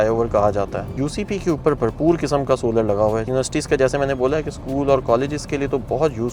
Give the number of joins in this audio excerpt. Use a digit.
2